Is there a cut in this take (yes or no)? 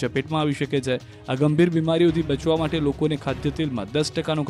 no